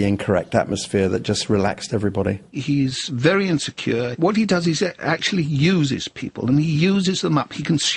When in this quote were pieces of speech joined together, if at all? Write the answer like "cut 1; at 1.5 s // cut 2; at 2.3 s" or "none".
cut 1; at 2.6 s // cut 2; at 4.2 s